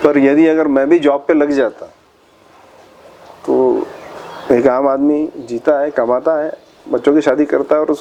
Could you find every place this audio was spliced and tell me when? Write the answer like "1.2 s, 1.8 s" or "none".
none

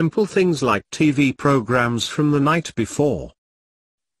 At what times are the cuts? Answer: 2.9 s

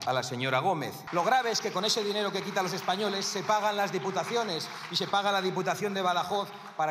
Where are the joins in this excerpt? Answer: 1.0 s

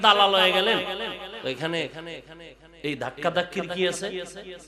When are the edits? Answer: 1.3 s

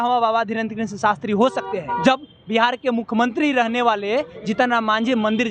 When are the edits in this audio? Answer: 2.0 s

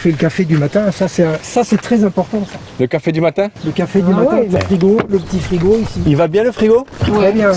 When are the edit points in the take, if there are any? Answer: 4.6 s

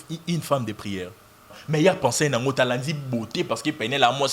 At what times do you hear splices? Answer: 1.6 s

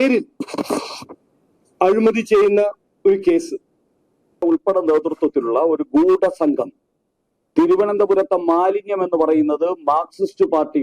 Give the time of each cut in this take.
4.4 s

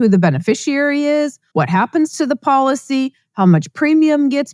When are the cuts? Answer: 1.4 s

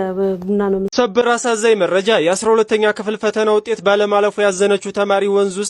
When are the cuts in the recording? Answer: 0.9 s

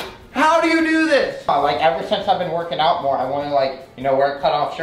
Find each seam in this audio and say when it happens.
1.5 s

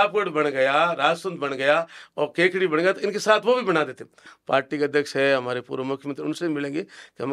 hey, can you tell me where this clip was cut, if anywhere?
4.3 s

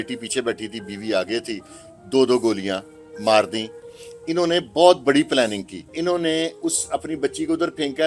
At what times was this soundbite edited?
5.9 s

